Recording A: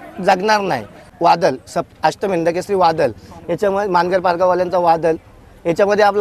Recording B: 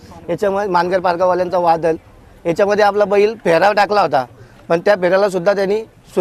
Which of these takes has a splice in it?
A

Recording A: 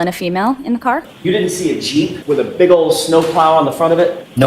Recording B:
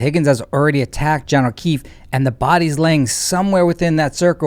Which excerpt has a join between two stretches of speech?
A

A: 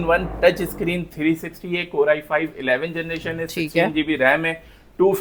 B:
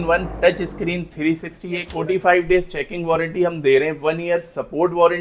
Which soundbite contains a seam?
B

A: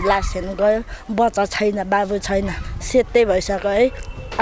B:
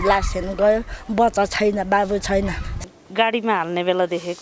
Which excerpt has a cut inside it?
B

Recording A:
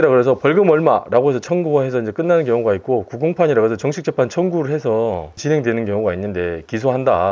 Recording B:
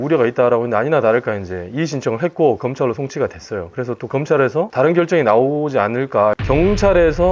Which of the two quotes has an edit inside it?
B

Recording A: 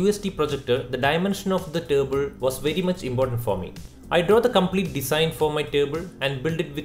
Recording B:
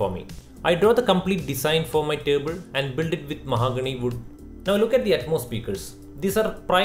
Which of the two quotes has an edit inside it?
B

